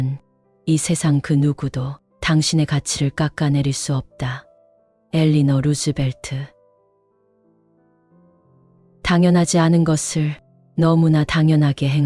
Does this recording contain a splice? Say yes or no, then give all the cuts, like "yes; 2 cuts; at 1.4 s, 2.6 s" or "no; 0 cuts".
no; 0 cuts